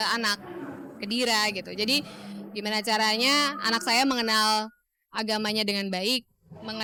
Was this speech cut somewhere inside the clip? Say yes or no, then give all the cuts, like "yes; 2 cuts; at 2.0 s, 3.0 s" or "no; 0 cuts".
no; 0 cuts